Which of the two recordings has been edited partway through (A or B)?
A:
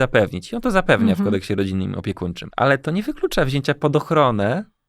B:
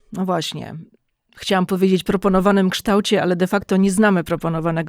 A